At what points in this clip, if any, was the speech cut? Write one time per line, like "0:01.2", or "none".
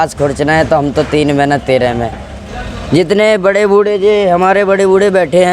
0:02.3